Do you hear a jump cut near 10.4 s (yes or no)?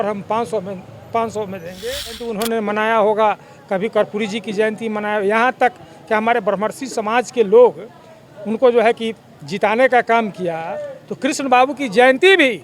no